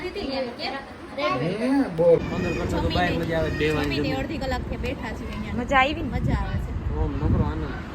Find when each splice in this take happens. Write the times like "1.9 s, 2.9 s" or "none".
2.3 s